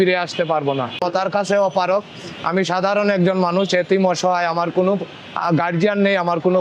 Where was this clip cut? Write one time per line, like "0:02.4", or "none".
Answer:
0:01.0